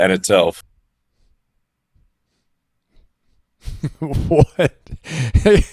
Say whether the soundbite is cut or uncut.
uncut